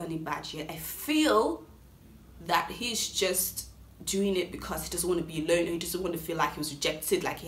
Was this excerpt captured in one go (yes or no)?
yes